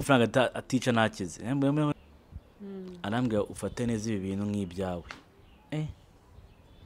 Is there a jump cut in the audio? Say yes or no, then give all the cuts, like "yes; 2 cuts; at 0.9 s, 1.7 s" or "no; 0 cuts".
yes; 1 cut; at 1.9 s